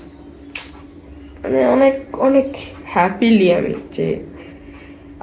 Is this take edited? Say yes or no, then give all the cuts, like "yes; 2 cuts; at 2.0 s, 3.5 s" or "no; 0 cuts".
no; 0 cuts